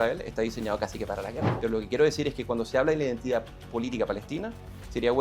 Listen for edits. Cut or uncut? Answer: cut